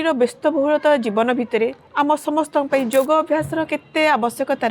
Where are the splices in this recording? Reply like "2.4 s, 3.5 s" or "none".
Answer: 1.8 s